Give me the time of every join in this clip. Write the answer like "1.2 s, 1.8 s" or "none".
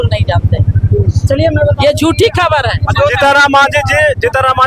none